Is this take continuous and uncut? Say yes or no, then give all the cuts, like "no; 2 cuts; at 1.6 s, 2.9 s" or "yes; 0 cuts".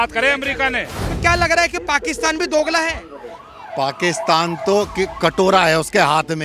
no; 1 cut; at 1.0 s